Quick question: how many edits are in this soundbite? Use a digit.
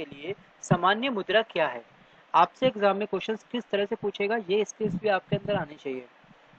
1